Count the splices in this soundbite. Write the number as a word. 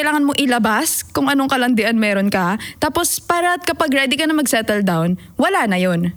zero